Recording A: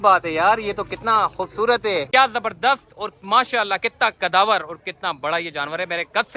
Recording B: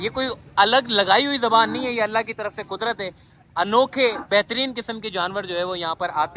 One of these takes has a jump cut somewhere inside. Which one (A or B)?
A